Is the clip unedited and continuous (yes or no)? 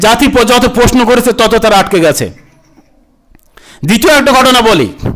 yes